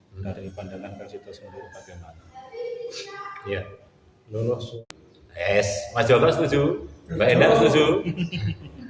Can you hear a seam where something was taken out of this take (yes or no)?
yes